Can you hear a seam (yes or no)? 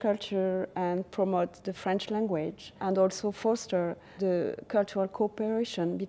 yes